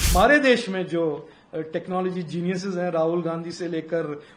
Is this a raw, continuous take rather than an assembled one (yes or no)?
yes